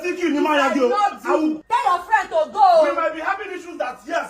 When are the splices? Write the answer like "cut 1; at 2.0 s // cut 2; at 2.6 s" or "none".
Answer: cut 1; at 1.9 s